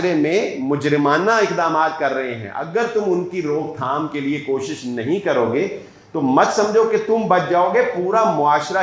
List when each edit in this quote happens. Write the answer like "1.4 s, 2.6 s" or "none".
none